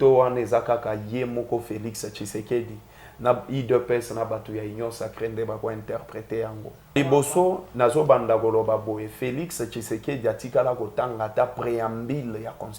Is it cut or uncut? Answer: cut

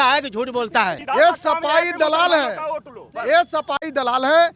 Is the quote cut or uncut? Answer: cut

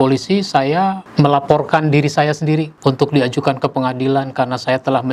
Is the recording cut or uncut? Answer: uncut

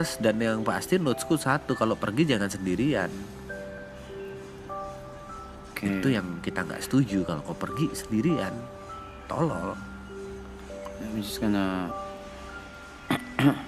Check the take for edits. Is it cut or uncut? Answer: uncut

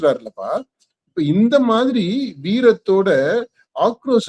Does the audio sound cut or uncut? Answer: uncut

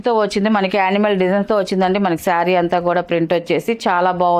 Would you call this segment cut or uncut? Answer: uncut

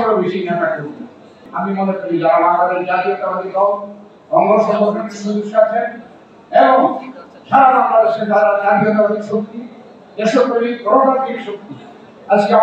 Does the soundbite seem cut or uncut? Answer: cut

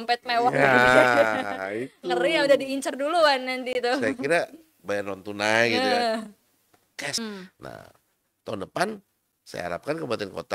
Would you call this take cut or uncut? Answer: cut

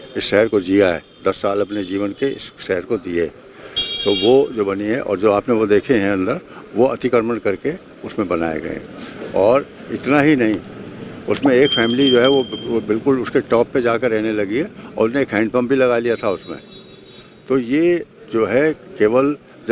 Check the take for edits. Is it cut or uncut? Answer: uncut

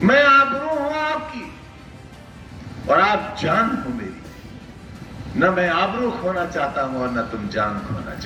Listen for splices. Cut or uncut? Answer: uncut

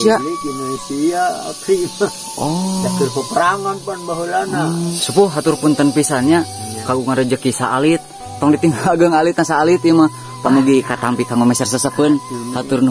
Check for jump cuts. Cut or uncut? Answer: cut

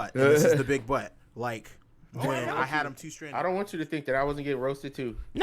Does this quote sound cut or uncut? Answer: cut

